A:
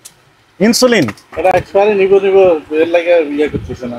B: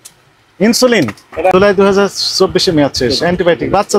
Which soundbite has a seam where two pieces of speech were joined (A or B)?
B